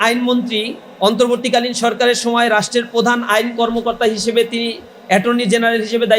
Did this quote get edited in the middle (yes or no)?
no